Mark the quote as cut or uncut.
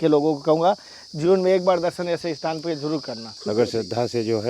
cut